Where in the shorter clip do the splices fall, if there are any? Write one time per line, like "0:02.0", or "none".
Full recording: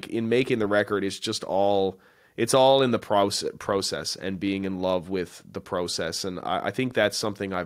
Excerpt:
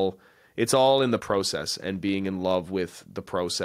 0:01.2